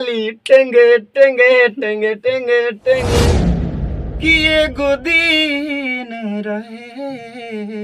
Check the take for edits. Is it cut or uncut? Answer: cut